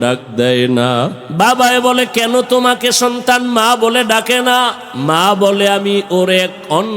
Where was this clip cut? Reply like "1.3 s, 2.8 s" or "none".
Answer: 1.2 s, 4.9 s